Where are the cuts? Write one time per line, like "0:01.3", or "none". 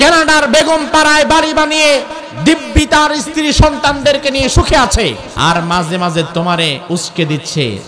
0:05.3
0:06.8